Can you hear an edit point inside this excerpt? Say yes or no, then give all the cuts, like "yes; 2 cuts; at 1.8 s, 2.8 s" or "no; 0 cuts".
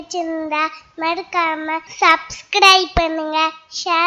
yes; 1 cut; at 1.9 s